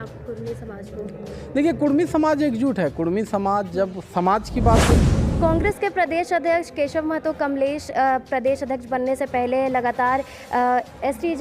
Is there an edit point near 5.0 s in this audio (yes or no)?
yes